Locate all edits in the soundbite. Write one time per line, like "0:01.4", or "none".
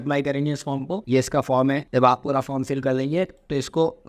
0:01.1
0:01.9